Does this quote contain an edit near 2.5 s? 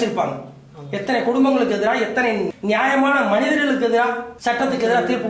yes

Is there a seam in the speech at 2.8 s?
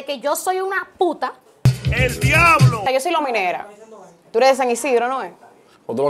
yes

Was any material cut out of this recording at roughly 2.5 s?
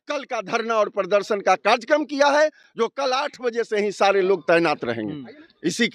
no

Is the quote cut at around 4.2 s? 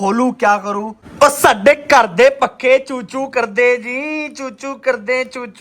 no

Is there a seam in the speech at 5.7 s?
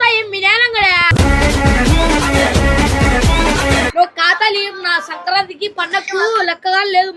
no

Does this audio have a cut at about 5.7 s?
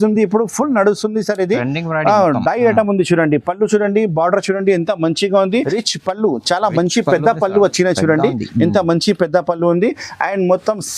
yes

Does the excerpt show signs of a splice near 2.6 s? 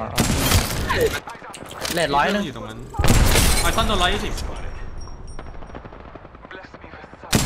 no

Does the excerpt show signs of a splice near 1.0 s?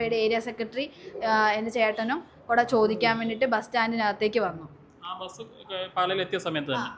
no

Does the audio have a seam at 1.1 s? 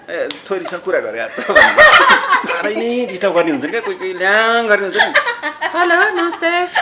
no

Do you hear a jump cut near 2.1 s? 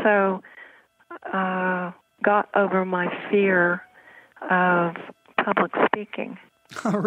no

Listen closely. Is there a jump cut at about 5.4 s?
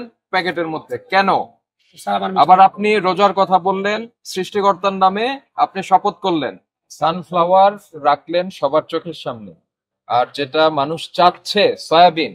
no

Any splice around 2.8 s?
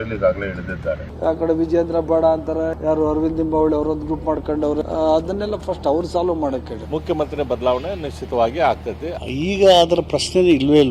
yes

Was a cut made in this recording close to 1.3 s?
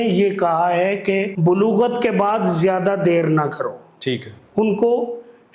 yes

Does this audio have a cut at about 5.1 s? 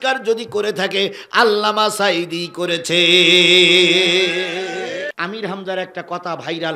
yes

